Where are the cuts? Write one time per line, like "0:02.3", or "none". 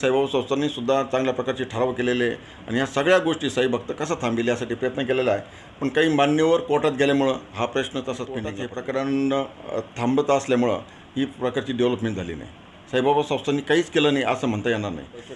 0:08.6